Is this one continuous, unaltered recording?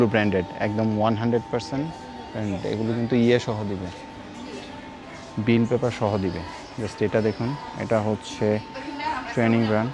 yes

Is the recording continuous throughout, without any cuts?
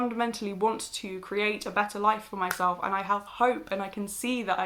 yes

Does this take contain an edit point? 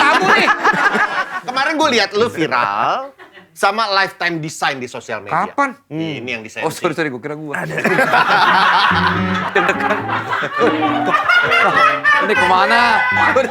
yes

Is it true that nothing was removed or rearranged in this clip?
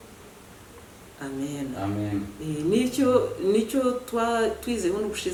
yes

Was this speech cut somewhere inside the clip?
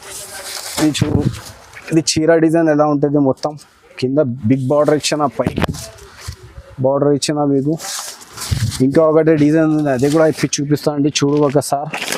no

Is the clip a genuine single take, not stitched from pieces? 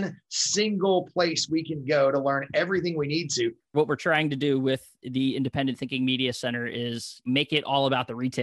no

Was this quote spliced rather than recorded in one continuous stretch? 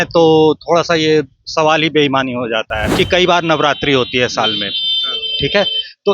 yes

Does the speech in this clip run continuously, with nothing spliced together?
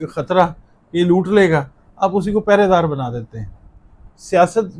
no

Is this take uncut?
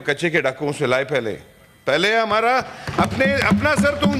yes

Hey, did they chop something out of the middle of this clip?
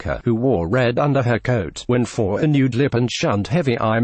yes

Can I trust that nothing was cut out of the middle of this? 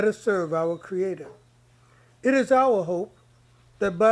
yes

